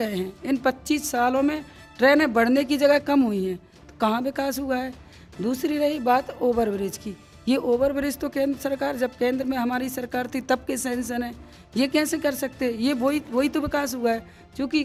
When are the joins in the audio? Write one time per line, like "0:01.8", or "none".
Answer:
none